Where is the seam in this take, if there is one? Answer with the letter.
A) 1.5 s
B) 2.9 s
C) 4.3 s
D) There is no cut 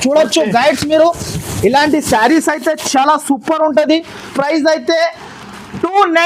C